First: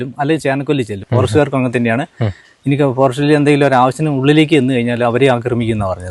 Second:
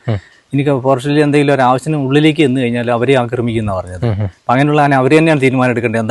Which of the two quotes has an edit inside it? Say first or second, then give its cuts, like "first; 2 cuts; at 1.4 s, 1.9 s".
first; 1 cut; at 1.0 s